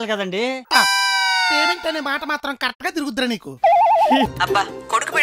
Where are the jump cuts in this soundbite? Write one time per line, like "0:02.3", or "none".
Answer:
0:04.3